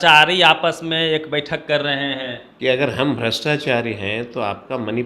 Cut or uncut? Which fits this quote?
cut